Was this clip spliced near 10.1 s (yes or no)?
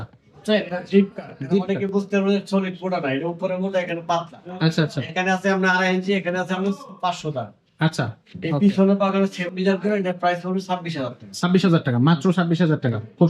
no